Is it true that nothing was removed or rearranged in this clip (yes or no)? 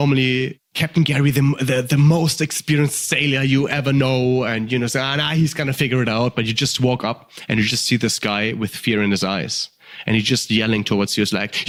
yes